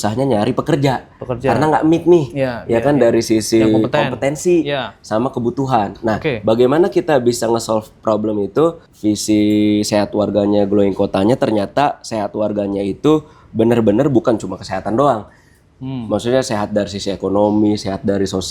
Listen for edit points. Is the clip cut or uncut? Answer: cut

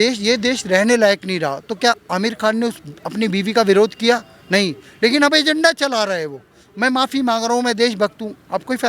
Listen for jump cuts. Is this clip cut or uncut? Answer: uncut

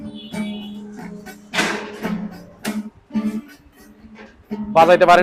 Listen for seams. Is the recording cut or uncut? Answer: uncut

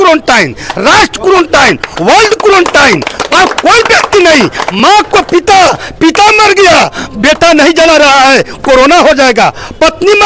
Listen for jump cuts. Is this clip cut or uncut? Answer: uncut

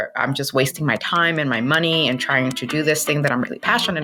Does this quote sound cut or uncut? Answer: uncut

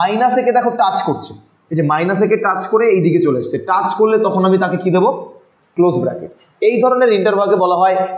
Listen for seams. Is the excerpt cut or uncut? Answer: uncut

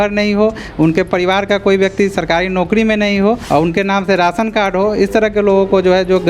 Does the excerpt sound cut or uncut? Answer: cut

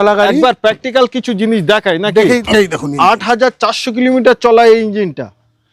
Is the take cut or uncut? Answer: cut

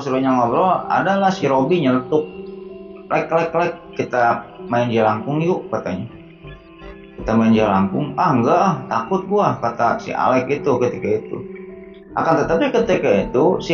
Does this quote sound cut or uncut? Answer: uncut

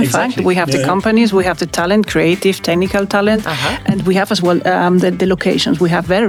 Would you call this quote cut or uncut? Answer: uncut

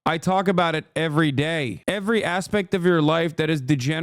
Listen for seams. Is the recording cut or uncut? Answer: cut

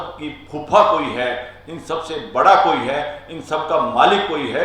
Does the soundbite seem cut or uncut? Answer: uncut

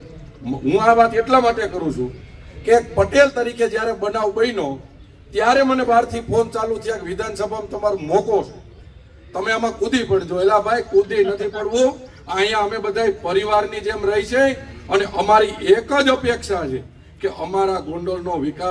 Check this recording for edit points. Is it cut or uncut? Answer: uncut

